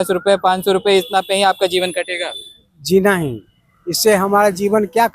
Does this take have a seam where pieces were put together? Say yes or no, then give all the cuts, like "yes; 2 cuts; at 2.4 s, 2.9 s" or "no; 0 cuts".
no; 0 cuts